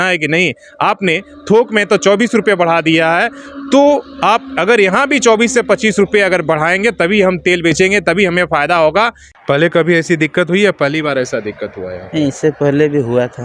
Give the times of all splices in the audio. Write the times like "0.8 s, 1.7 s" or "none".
9.2 s